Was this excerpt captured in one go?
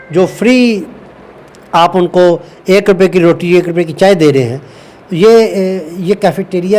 yes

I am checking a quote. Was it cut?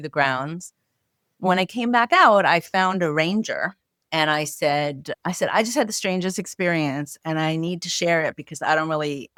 no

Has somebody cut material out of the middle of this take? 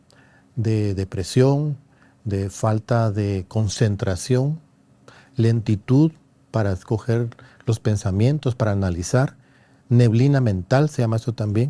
no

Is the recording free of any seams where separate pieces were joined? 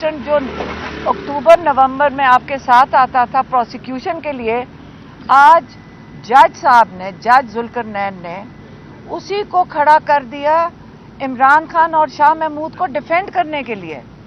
yes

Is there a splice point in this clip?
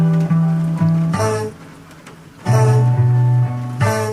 yes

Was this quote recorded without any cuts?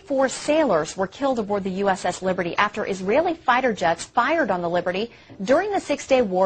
yes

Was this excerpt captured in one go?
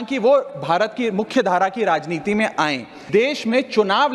no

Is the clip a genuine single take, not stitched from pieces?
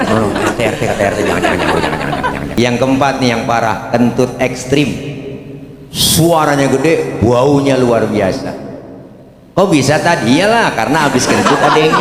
no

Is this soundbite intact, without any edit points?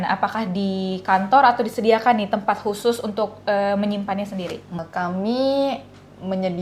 no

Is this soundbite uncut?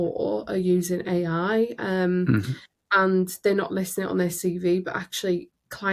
yes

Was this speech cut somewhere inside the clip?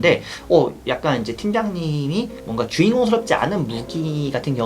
yes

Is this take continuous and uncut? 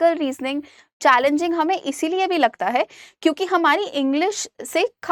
yes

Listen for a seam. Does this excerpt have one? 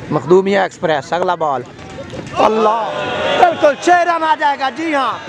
no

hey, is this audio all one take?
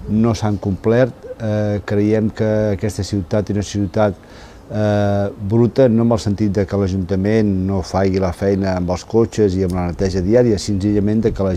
no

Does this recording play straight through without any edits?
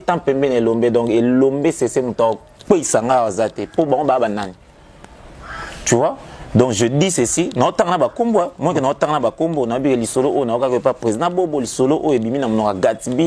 yes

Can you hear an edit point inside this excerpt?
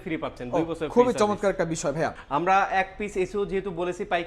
yes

